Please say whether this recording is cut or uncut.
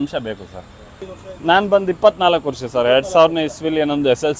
uncut